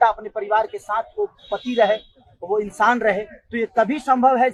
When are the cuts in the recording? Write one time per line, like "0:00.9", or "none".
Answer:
none